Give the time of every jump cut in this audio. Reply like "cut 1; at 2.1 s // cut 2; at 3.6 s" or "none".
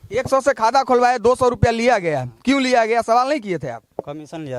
none